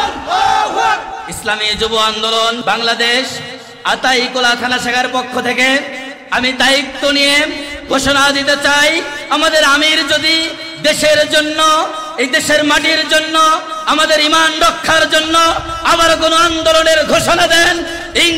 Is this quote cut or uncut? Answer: cut